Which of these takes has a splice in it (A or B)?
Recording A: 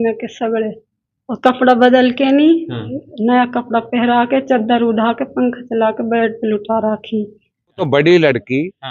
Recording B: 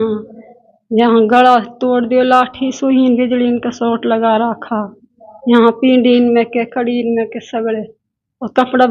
A